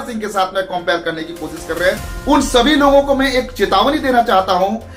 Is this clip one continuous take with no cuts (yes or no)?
no